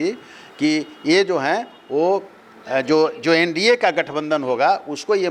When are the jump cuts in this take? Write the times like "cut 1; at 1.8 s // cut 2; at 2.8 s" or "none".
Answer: none

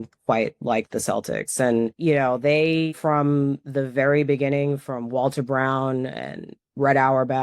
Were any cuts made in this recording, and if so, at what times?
cut 1; at 2.0 s // cut 2; at 2.9 s

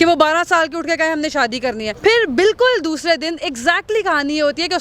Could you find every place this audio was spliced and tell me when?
cut 1; at 1.9 s

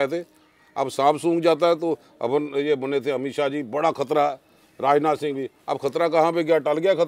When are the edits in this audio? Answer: none

